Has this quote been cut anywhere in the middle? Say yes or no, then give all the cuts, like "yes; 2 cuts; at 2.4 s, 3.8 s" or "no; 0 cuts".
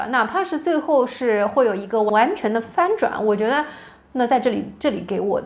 no; 0 cuts